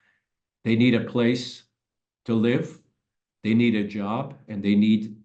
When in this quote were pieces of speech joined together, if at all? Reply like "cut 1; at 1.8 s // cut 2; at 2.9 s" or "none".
none